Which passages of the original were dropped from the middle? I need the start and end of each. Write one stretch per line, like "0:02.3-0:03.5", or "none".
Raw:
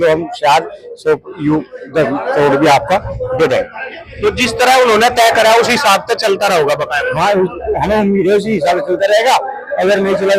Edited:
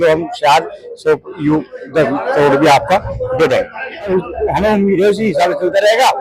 0:04.1-0:07.4